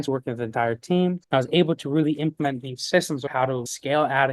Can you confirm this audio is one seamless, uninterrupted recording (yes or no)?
no